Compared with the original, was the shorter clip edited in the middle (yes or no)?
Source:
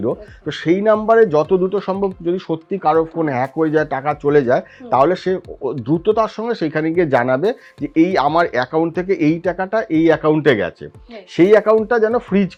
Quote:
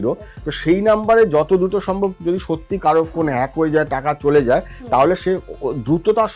no